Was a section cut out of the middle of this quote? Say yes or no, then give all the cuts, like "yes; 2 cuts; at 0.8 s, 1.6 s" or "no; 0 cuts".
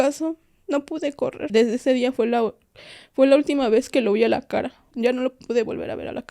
yes; 2 cuts; at 1.4 s, 4.9 s